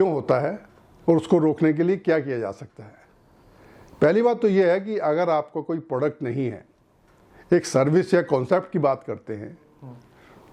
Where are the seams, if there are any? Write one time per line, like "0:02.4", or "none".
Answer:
none